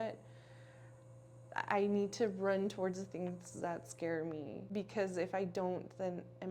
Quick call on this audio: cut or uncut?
cut